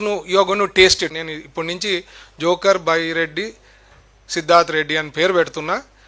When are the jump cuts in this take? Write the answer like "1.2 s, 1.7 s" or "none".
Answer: 1.1 s